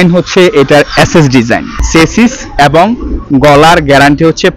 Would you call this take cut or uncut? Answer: cut